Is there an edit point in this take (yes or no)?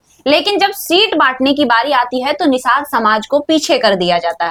no